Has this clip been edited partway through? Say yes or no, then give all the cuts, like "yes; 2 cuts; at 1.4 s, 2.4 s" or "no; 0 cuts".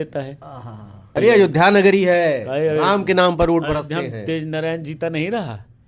yes; 1 cut; at 1.0 s